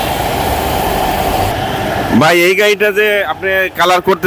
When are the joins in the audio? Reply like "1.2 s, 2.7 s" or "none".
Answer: none